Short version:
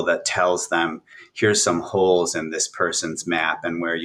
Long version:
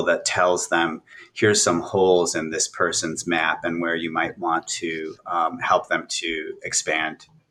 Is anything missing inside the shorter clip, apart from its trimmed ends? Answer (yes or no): no